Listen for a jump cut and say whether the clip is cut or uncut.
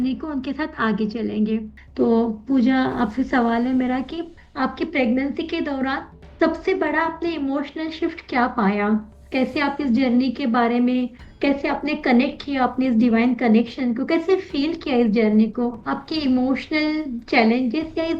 cut